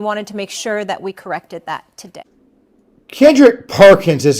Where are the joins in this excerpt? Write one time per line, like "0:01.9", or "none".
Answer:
0:02.0